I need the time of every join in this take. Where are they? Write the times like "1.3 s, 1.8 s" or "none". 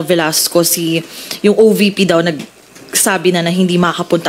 none